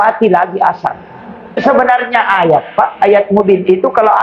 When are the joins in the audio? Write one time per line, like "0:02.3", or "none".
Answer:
0:01.6